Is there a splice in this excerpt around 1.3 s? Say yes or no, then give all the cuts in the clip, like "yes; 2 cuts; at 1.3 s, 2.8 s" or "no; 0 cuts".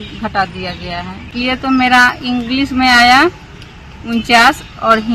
yes; 1 cut; at 1.3 s